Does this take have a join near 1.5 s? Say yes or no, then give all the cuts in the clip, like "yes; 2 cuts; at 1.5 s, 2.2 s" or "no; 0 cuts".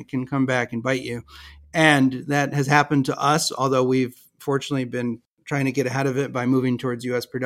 no; 1 cut; at 5.3 s